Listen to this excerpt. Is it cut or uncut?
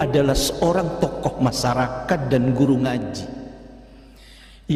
uncut